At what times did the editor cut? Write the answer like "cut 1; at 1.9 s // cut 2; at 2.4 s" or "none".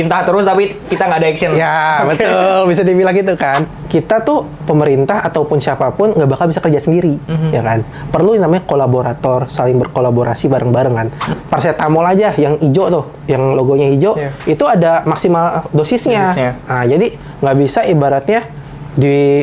cut 1; at 3.7 s // cut 2; at 11.3 s